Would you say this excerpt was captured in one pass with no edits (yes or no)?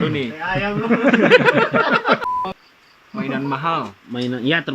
no